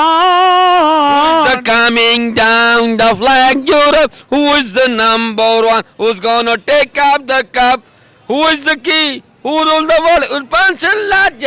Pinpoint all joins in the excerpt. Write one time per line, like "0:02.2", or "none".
none